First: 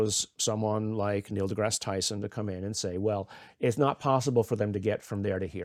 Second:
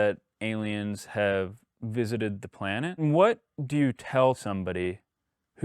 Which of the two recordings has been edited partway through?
second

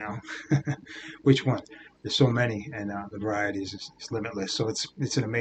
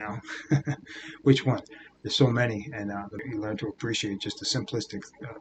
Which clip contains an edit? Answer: second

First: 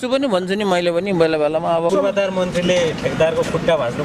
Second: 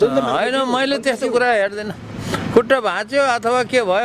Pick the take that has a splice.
first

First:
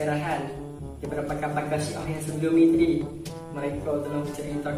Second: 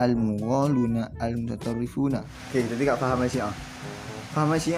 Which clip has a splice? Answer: second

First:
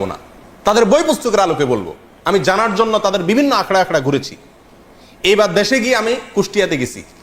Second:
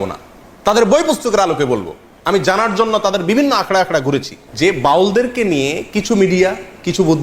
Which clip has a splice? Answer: second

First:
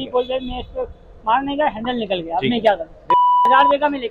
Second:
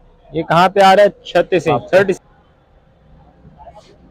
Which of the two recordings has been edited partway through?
second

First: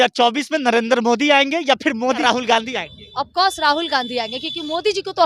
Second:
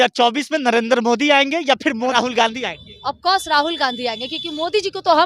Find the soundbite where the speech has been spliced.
second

